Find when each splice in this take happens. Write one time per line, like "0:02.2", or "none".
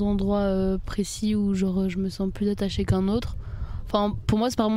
none